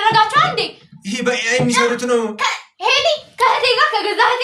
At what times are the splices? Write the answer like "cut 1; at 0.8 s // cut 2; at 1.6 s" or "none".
none

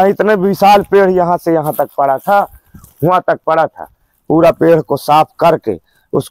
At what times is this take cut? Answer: none

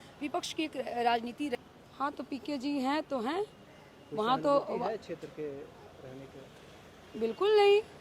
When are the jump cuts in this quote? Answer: cut 1; at 1.6 s

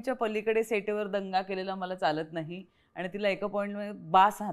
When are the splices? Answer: none

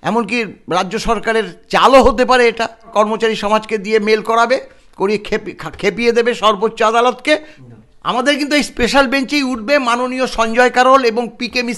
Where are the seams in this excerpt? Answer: cut 1; at 2.9 s // cut 2; at 7.6 s

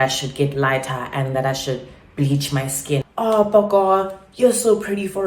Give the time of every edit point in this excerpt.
cut 1; at 3.0 s

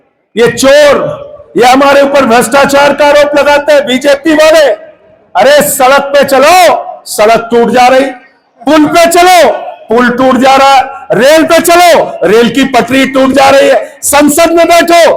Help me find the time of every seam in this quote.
none

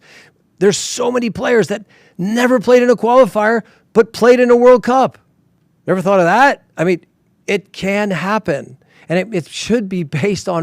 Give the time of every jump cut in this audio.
none

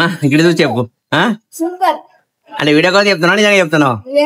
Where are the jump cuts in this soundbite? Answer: none

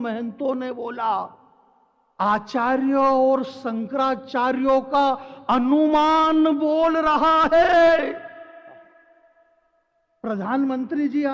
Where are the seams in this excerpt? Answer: none

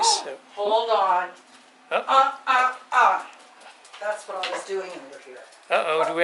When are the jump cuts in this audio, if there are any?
none

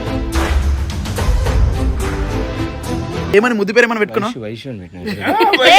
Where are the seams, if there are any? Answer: cut 1; at 3.3 s

